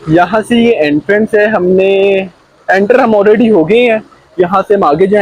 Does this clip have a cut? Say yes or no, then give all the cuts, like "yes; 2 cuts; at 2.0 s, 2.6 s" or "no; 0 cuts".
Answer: no; 0 cuts